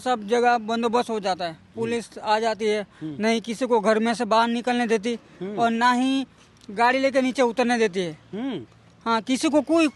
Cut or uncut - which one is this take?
uncut